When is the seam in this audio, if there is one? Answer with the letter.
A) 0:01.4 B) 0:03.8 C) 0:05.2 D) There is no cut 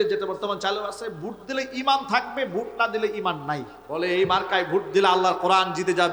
B